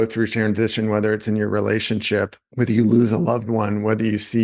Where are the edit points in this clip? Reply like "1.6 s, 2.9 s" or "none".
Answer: 2.4 s